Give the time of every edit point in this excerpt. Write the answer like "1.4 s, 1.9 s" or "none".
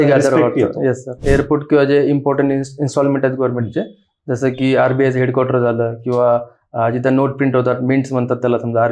1.1 s